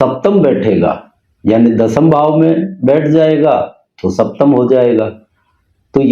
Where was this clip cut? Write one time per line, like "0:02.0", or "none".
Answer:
none